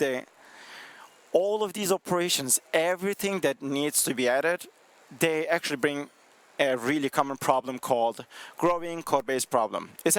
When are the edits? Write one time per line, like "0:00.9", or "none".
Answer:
none